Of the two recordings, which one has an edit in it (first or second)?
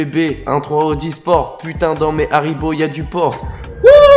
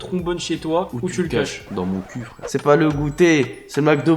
second